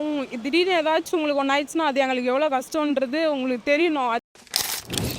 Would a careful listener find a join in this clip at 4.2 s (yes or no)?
yes